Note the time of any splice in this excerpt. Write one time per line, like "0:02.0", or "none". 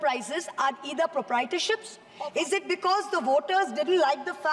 0:02.0